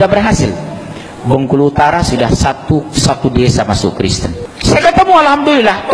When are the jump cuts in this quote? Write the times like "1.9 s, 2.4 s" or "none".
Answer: 4.4 s

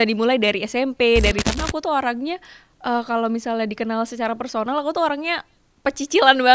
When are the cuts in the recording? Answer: 1.4 s

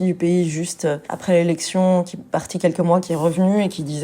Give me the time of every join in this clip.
1.1 s

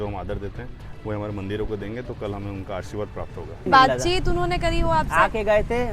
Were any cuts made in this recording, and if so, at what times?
3.7 s

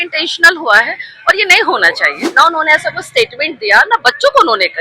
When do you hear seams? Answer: 2.2 s

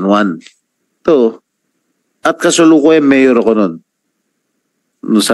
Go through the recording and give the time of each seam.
none

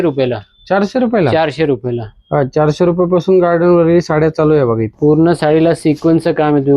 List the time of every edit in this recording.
4.9 s

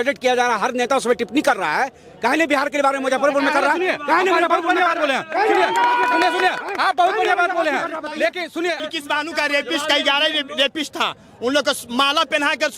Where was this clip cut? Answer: 8.8 s

